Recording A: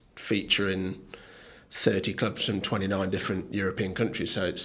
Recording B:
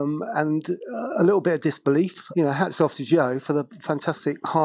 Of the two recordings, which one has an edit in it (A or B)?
B